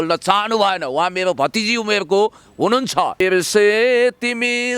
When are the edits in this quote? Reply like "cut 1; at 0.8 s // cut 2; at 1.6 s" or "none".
cut 1; at 3.2 s